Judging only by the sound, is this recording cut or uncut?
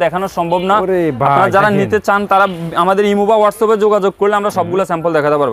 uncut